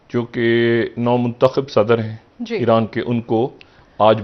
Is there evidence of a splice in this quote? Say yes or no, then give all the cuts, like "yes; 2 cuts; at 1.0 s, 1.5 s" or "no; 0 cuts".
no; 0 cuts